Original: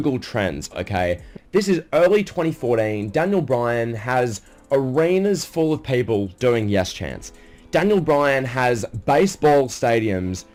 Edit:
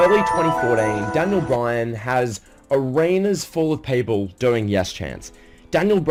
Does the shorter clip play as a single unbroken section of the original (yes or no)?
yes